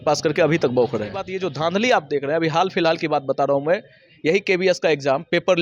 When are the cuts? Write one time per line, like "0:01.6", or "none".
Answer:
0:01.2